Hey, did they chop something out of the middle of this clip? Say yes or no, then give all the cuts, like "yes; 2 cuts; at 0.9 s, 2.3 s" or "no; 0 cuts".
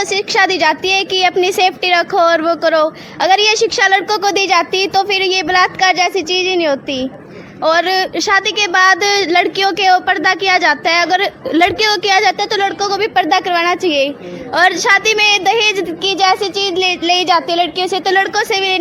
no; 0 cuts